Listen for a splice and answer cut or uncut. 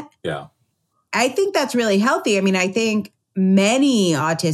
cut